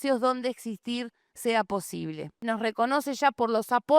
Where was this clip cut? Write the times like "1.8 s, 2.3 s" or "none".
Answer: 2.5 s